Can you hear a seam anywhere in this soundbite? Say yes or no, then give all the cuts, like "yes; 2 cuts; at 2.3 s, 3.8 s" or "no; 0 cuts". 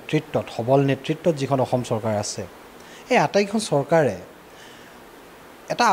no; 0 cuts